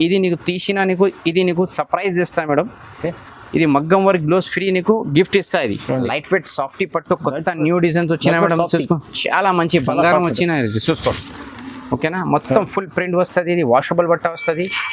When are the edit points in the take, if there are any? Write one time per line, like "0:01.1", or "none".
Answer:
0:06.0